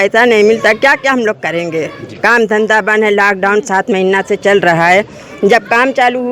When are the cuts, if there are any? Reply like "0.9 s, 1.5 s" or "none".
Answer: none